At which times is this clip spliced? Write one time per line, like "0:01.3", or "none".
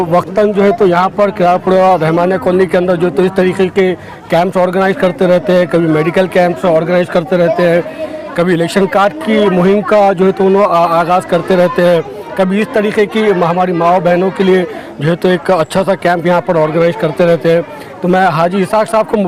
none

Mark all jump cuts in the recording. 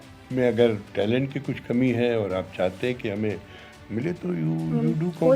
none

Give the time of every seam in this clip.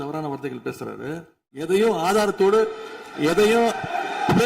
0:01.6

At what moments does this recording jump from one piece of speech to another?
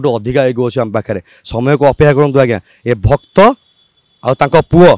none

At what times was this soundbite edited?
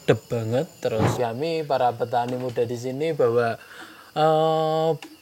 0:01.1

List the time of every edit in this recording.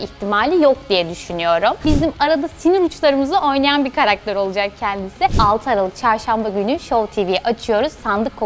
0:01.8
0:05.3

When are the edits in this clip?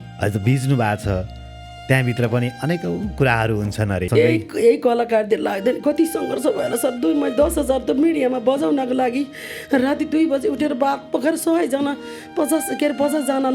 0:04.1

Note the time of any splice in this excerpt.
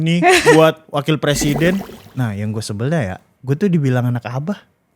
0:01.9

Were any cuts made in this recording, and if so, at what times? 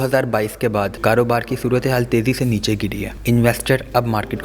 0:00.9
0:03.1

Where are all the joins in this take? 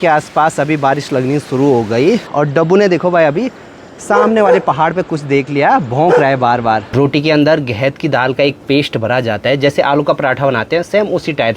0:02.3
0:06.9

